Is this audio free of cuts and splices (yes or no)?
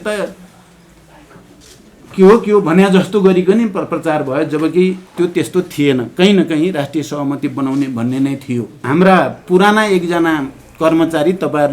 no